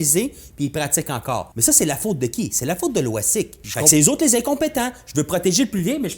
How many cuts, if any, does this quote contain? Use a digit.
2